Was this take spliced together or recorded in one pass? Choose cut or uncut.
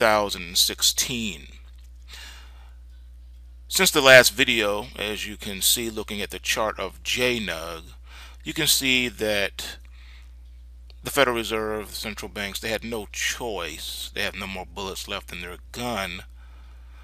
cut